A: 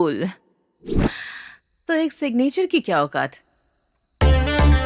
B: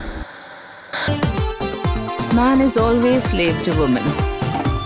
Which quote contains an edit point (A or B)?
B